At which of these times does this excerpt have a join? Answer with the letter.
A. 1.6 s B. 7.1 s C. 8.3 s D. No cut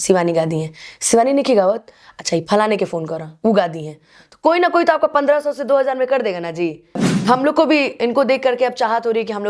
B